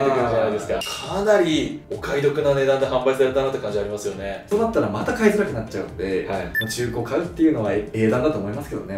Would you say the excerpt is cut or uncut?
cut